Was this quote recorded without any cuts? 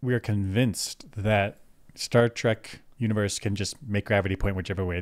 yes; 0 cuts

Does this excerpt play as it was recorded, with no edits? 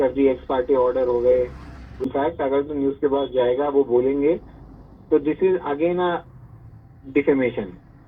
no; 1 cut; at 2.1 s

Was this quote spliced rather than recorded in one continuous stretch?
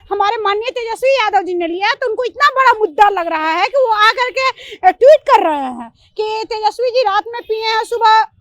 no; 0 cuts

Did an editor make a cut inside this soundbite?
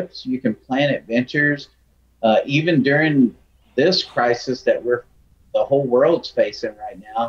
no; 0 cuts

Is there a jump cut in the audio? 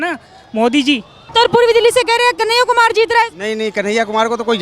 yes; 1 cut; at 1.2 s

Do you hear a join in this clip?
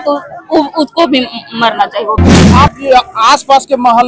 yes; 1 cut; at 2.5 s

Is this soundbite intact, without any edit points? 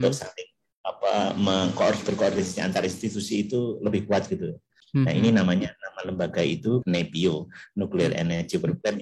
no; 2 cuts; at 4.8 s, 6.8 s

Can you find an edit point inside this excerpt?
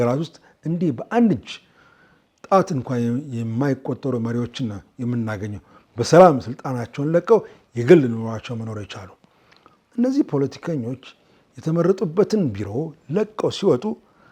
no; 0 cuts

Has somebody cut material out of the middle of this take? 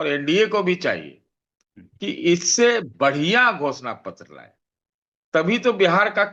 no; 0 cuts

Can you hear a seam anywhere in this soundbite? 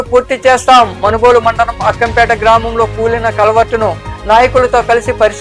no; 0 cuts

